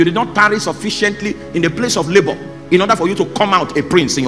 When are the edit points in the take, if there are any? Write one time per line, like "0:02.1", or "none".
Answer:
none